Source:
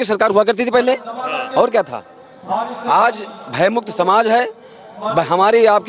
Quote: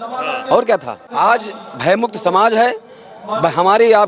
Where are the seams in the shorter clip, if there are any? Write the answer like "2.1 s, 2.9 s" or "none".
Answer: 1.0 s